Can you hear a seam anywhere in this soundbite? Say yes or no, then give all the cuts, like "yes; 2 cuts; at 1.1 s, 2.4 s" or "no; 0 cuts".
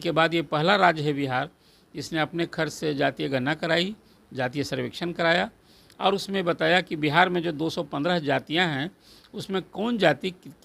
no; 0 cuts